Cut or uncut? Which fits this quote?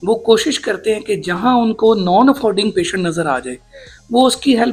uncut